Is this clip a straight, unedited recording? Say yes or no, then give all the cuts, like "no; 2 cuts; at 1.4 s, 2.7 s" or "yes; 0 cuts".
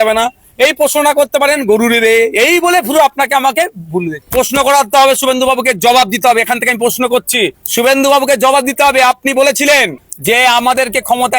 yes; 0 cuts